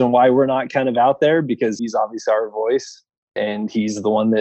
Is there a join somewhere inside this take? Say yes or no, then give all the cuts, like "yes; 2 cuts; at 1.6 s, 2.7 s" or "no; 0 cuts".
yes; 2 cuts; at 1.8 s, 3.4 s